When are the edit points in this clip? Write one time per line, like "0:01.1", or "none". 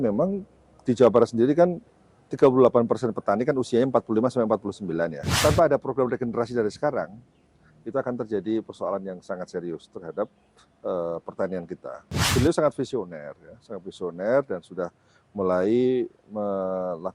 0:05.2
0:12.2